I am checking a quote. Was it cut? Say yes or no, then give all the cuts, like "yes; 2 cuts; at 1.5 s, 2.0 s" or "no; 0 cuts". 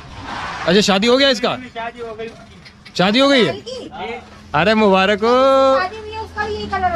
no; 0 cuts